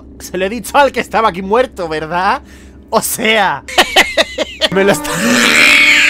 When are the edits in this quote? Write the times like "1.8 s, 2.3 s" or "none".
3.6 s, 4.7 s

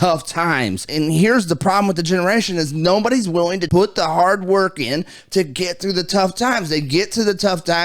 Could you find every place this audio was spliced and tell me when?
0.9 s, 3.6 s

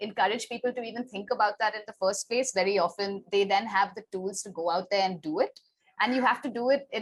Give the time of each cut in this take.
none

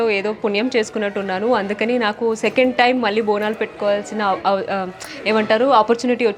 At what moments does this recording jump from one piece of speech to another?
none

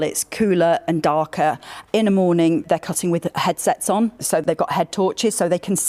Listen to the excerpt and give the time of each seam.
none

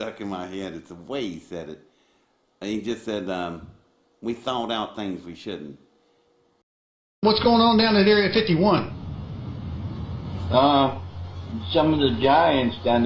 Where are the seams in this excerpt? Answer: 6.5 s

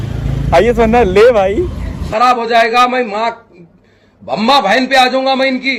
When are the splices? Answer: none

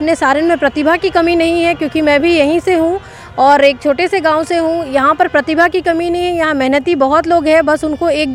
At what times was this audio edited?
none

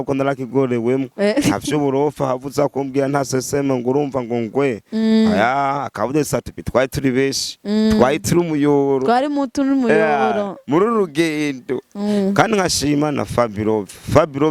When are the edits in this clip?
11.9 s

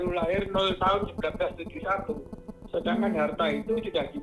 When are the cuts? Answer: none

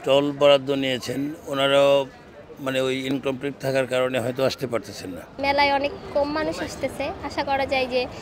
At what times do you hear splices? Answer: 5.3 s

